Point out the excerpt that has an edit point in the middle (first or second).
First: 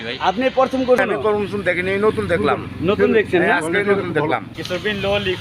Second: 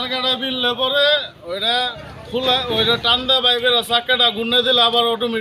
first